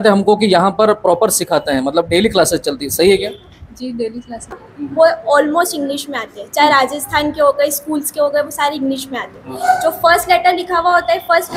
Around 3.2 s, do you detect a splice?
no; 1 cut; at 4.6 s

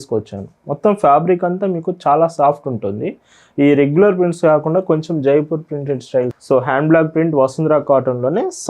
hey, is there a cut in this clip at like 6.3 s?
yes; 1 cut; at 6.3 s

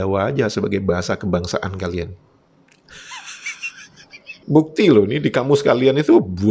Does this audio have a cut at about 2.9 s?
no; 1 cut; at 4.4 s

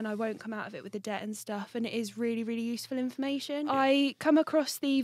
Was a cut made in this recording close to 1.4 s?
no; 1 cut; at 3.5 s

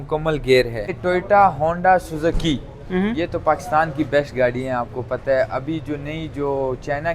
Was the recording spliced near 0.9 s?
yes; 1 cut; at 0.9 s

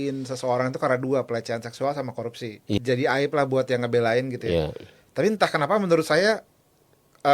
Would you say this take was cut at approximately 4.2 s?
no; 1 cut; at 2.8 s

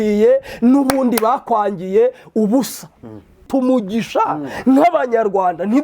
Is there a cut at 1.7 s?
no; 1 cut; at 3.5 s

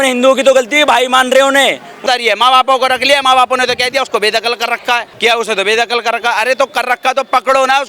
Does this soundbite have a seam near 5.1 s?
yes; 2 cuts; at 1.9 s, 5.1 s

